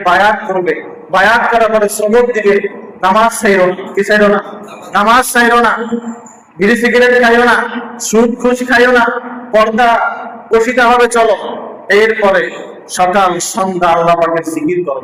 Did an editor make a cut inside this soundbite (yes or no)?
no